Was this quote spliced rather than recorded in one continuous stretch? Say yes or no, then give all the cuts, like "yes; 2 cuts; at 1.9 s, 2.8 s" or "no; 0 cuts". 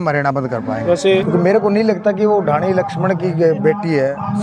yes; 1 cut; at 1.2 s